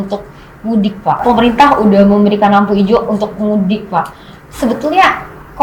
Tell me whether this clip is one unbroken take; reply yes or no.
no